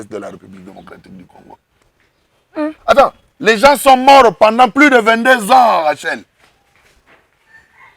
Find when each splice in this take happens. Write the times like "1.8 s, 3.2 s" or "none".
1.7 s